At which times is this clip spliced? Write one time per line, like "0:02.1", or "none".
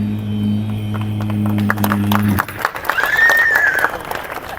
0:03.0